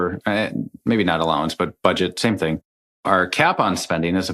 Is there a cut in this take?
no; 0 cuts

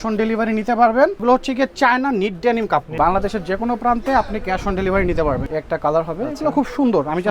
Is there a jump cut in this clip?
yes; 3 cuts; at 1.2 s, 2.9 s, 5.4 s

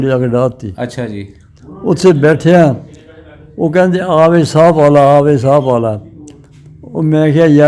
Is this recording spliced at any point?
no; 0 cuts

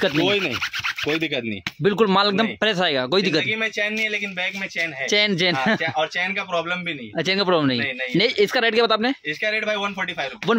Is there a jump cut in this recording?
no; 0 cuts

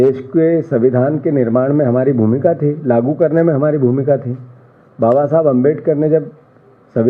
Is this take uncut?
yes; 0 cuts

